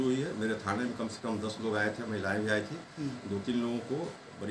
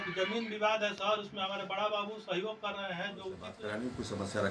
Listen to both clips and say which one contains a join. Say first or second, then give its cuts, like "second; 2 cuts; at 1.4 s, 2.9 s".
second; 1 cut; at 3.5 s